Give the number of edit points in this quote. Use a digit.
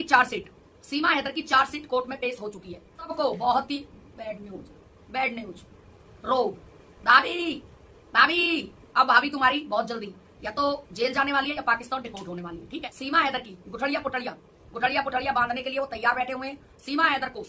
2